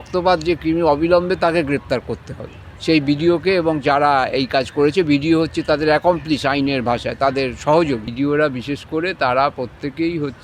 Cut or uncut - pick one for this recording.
cut